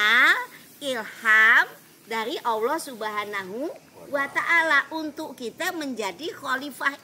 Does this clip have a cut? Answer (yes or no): no